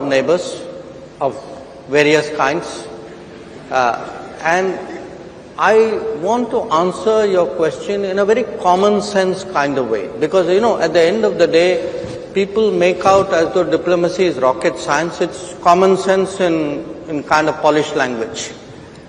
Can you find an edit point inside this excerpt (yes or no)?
no